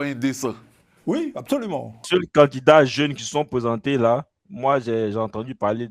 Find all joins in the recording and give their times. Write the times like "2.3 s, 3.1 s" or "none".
2.0 s